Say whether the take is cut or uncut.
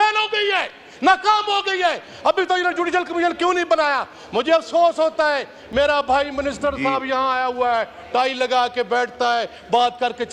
uncut